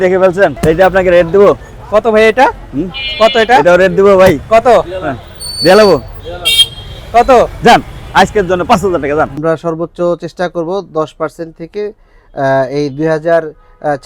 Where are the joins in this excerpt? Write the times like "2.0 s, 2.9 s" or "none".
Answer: 9.3 s